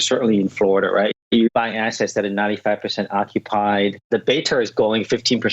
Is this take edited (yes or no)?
yes